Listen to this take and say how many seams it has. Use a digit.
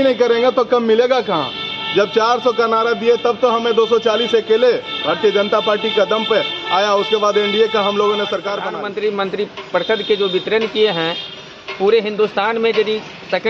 1